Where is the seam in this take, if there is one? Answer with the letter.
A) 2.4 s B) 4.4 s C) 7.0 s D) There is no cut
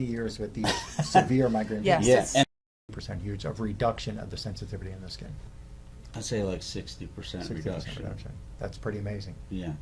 A